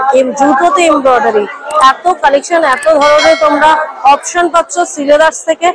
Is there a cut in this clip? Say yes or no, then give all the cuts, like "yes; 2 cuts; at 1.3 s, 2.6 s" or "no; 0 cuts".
no; 0 cuts